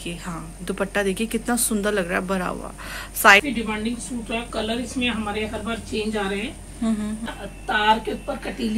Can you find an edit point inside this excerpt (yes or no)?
yes